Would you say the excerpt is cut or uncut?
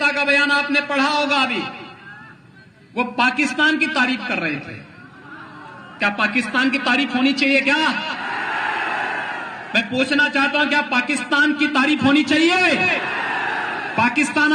uncut